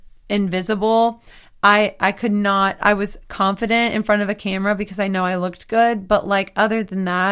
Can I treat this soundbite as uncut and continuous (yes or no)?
yes